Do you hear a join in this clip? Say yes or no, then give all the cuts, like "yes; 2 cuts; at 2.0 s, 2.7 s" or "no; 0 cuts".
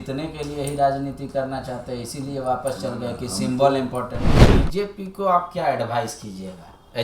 yes; 1 cut; at 4.5 s